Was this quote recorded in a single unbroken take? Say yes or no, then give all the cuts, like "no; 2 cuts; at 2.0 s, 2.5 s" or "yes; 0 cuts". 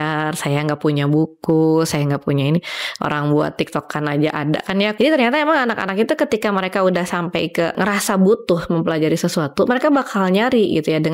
no; 2 cuts; at 4.9 s, 7.8 s